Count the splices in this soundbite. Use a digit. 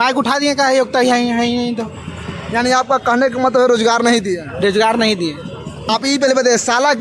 1